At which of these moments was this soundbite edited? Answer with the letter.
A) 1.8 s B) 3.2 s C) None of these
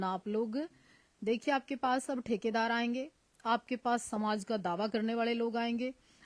C